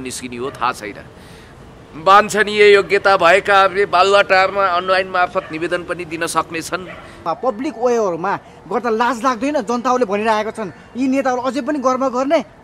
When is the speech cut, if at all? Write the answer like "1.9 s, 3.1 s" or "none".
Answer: 7.2 s